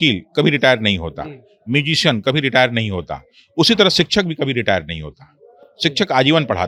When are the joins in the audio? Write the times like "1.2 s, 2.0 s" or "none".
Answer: none